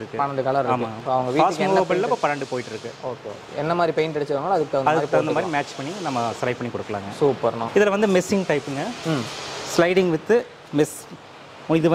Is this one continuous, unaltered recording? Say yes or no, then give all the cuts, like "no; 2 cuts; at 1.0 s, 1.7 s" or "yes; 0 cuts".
yes; 0 cuts